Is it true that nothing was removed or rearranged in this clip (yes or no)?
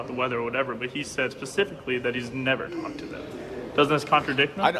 yes